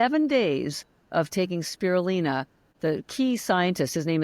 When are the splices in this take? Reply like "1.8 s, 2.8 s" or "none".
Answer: 2.6 s